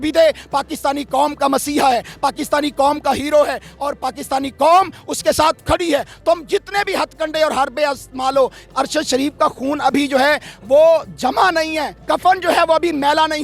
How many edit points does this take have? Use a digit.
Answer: 2